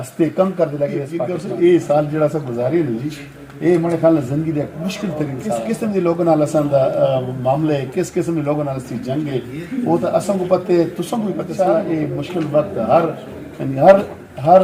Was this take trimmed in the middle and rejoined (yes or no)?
yes